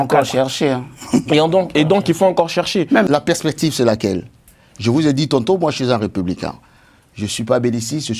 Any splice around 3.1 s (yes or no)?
yes